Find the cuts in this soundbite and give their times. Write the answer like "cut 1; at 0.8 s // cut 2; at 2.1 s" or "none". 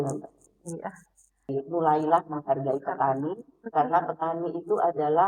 cut 1; at 1.5 s